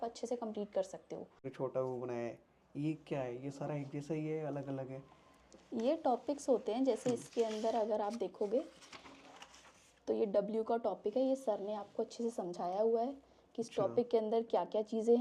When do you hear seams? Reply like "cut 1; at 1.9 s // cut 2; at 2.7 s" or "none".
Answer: cut 1; at 1.4 s